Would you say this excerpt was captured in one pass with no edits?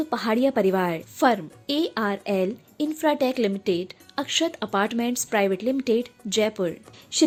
yes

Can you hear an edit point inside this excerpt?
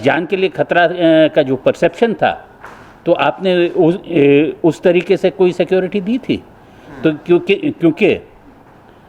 no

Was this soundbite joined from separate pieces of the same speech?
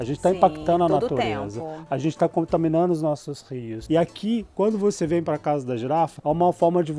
no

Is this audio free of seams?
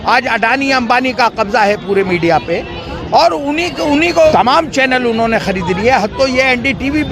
no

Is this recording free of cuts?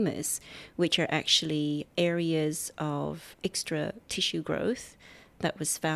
no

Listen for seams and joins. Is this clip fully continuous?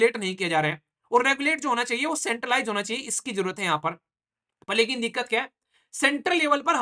yes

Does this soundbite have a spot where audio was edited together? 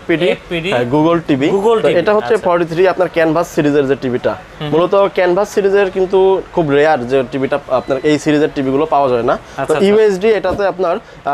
no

